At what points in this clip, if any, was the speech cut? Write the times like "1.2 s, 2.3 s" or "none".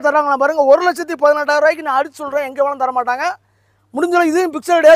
none